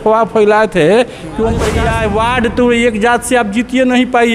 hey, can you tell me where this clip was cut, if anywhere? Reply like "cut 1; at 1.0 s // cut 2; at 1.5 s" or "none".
cut 1; at 1.9 s